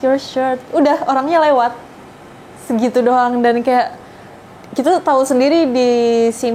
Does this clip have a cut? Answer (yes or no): no